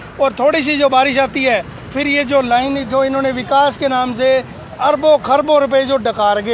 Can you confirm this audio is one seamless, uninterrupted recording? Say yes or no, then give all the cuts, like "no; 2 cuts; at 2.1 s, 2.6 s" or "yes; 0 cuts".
yes; 0 cuts